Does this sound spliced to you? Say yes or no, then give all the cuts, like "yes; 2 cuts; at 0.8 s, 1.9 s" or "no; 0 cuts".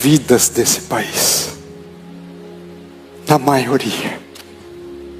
yes; 2 cuts; at 1.6 s, 3.2 s